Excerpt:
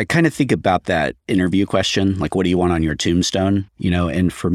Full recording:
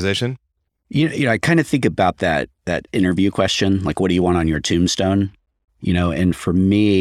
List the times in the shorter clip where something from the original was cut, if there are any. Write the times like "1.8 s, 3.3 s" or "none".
1.2 s, 3.7 s